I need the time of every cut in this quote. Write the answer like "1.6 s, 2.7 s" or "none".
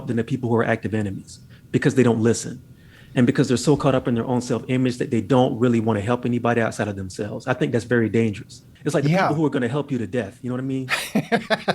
8.7 s